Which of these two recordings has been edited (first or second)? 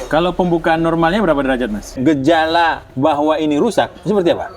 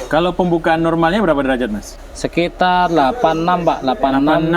first